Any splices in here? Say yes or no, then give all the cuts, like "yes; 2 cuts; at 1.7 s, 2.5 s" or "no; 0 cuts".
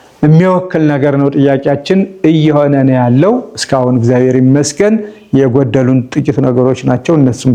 no; 0 cuts